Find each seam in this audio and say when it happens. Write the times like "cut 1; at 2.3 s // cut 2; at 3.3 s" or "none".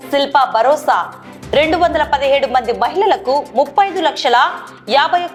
none